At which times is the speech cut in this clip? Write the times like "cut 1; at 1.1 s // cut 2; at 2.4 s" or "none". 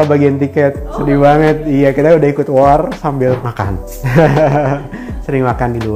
cut 1; at 3.4 s